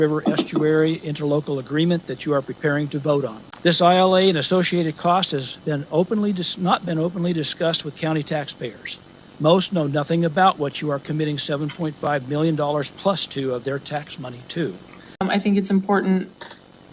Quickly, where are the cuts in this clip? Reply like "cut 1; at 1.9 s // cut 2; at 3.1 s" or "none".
cut 1; at 3.4 s // cut 2; at 15.2 s